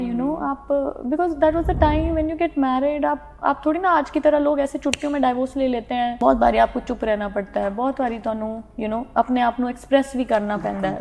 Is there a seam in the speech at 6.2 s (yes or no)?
yes